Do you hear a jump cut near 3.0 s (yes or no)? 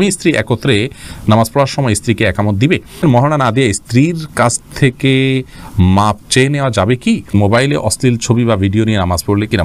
yes